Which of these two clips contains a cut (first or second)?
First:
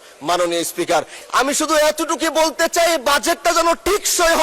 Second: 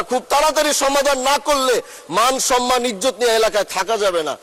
first